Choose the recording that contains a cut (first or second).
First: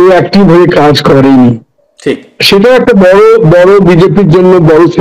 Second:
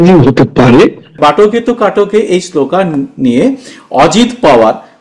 second